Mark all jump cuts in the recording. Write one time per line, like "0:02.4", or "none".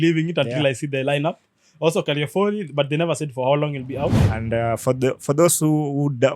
0:04.3